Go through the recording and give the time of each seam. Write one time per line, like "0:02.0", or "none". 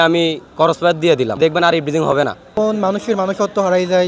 0:01.4
0:02.5